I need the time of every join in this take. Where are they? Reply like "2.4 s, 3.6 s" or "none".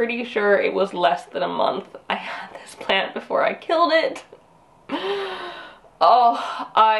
none